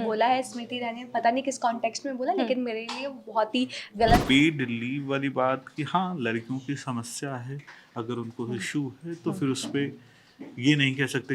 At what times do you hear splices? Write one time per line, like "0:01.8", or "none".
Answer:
0:04.2